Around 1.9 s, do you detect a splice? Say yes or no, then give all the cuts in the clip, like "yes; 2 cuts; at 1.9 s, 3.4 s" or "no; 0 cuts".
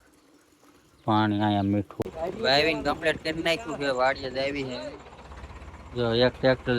yes; 1 cut; at 1.9 s